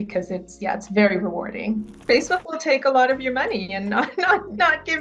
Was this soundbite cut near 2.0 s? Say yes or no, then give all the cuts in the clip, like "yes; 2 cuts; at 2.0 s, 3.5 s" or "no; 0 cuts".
yes; 1 cut; at 2.0 s